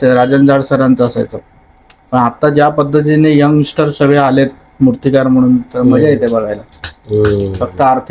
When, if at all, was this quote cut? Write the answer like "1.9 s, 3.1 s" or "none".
none